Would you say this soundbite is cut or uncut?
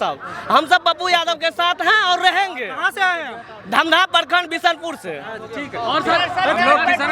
uncut